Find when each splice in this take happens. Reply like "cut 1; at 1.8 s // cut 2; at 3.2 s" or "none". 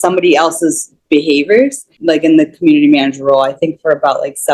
cut 1; at 1.9 s